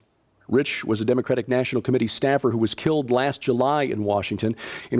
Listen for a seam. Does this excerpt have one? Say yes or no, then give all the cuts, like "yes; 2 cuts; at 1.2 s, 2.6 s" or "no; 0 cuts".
no; 0 cuts